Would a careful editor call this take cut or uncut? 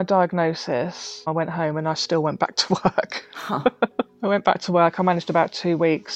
cut